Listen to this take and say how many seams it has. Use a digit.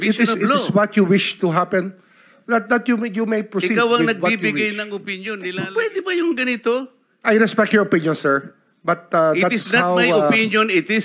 1